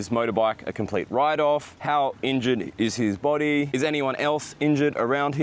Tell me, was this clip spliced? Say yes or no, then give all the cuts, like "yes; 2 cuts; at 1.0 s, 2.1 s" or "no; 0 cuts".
yes; 1 cut; at 1.7 s